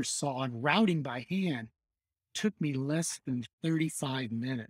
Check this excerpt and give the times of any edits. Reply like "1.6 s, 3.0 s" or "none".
none

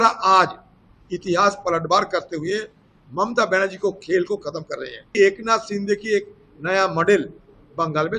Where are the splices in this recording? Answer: 5.1 s

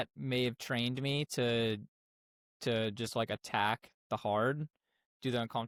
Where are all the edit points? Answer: none

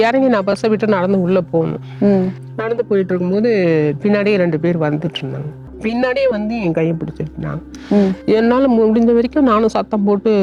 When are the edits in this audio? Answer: 5.7 s

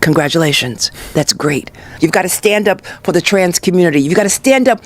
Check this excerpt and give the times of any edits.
1.9 s

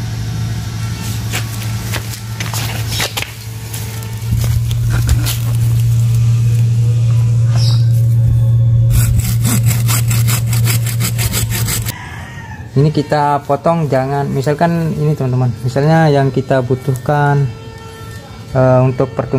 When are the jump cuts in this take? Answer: 11.9 s

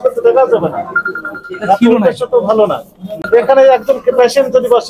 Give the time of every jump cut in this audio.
3.2 s

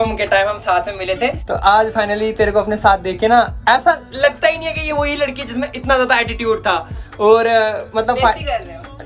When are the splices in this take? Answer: none

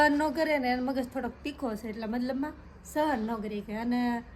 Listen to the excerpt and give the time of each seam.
none

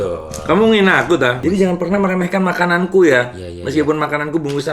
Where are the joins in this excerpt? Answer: 1.4 s

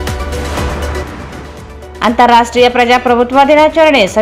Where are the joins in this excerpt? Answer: 1.6 s

